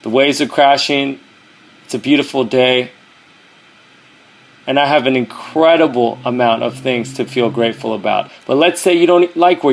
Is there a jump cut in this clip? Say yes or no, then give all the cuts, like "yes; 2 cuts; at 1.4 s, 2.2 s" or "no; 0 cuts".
yes; 1 cut; at 8.3 s